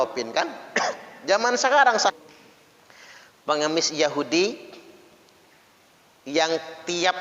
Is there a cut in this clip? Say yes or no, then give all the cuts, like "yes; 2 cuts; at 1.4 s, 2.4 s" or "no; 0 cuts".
yes; 1 cut; at 2.1 s